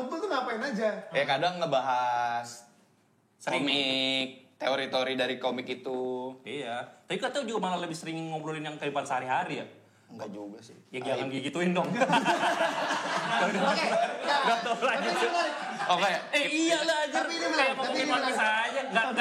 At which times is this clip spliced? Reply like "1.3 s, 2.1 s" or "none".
none